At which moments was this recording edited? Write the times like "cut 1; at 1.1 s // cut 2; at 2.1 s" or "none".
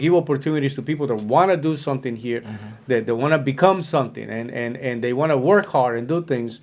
none